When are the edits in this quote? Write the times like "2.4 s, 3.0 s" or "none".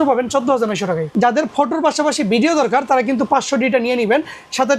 1.1 s

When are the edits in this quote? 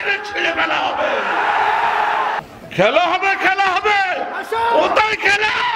2.4 s

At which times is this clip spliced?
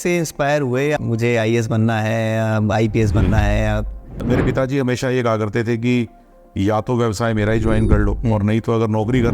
1.0 s, 4.2 s

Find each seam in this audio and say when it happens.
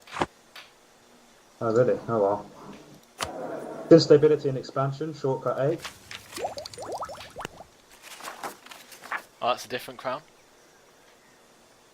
8.9 s

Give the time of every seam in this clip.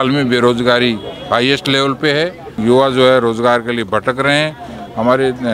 none

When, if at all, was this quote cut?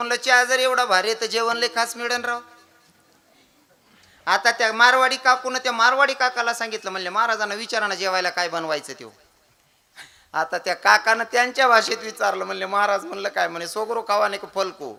none

